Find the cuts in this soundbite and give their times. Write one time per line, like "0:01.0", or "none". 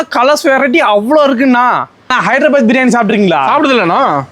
0:02.2